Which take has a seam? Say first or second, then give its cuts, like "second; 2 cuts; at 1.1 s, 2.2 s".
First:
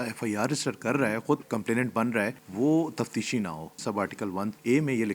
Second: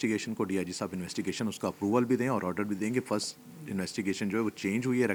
first; 3 cuts; at 1.4 s, 2.4 s, 4.1 s